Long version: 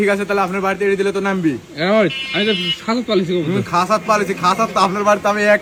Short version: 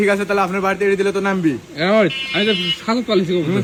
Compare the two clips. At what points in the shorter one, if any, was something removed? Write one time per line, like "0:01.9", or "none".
none

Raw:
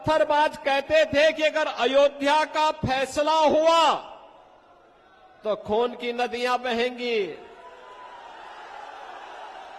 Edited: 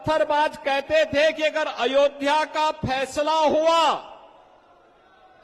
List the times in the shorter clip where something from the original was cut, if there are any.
none

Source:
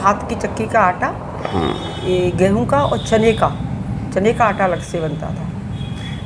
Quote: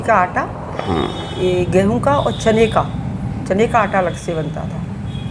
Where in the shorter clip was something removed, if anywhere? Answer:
none

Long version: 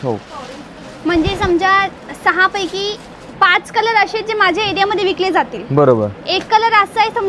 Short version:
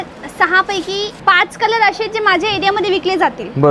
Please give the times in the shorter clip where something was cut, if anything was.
0:01.1

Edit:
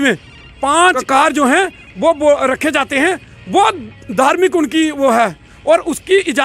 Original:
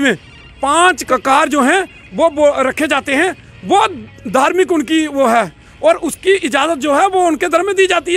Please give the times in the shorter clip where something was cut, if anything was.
0:01.0

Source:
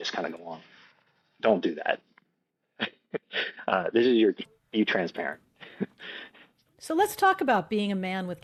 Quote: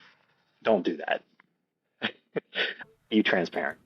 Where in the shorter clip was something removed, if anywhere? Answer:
0:02.8

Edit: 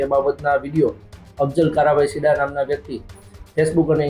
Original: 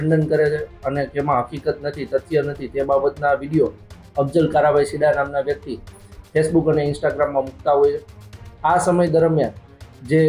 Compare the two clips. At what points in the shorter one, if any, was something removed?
none

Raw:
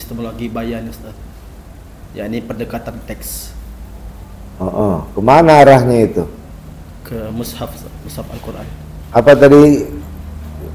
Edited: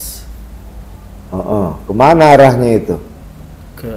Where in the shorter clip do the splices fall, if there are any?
none

